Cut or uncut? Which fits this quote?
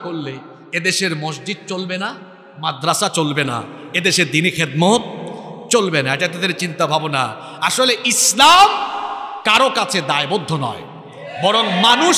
uncut